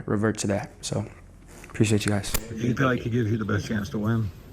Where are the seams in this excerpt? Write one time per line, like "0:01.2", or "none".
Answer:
0:02.3